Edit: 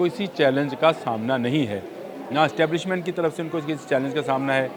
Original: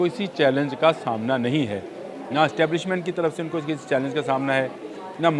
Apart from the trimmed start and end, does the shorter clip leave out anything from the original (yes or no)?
no